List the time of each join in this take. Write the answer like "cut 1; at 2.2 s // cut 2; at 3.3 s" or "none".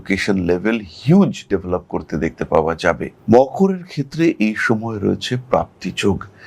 none